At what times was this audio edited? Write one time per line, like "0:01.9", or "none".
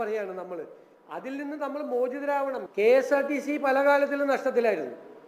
0:02.7